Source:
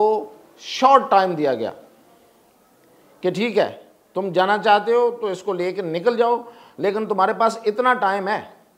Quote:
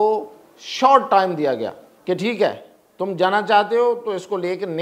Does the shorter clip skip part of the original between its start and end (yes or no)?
yes